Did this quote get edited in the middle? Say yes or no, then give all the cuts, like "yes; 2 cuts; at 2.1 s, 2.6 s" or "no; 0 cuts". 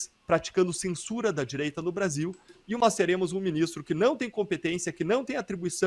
yes; 1 cut; at 2.8 s